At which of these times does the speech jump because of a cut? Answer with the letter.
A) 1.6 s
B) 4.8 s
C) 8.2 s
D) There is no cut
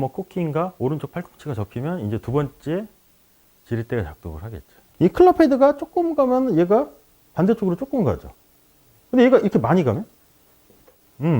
B